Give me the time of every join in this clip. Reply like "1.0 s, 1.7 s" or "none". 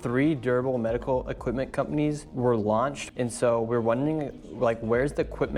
2.3 s, 3.0 s